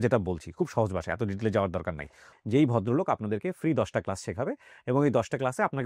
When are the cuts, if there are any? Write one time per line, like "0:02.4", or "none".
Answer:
0:02.3